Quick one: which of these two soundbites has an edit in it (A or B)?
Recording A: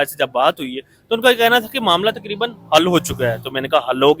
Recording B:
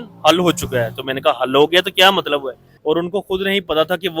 B